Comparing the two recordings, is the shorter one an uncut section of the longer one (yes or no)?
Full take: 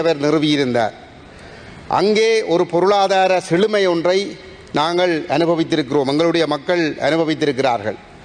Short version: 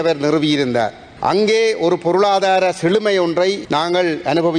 no